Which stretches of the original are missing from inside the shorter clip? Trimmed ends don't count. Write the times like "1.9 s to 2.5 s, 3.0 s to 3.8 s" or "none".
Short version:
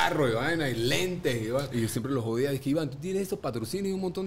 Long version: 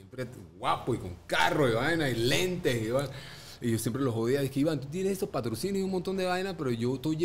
3.1 s to 3.6 s